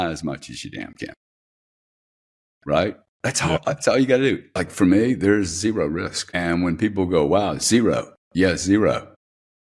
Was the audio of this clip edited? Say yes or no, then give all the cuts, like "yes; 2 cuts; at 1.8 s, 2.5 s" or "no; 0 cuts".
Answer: yes; 1 cut; at 4.5 s